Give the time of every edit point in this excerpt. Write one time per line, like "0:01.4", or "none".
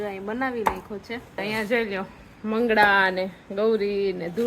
0:01.4